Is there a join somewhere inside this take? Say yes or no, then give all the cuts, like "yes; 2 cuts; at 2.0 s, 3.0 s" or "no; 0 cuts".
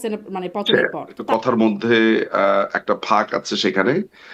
yes; 1 cut; at 1.2 s